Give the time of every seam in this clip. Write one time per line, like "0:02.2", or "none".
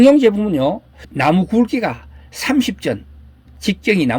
0:01.1